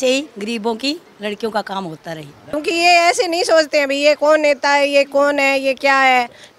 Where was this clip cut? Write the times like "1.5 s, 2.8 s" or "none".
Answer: 2.5 s